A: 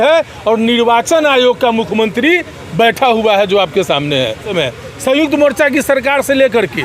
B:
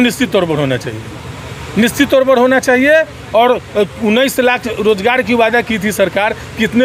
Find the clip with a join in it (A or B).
A